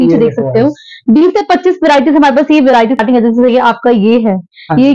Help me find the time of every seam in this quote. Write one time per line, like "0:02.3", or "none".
0:03.0